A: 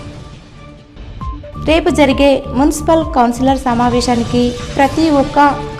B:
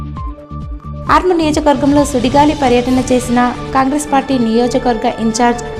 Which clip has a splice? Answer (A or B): A